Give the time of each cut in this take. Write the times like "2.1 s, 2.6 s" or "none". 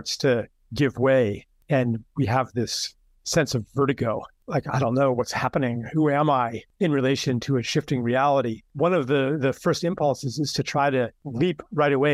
1.5 s, 4.3 s, 6.6 s, 8.6 s, 11.2 s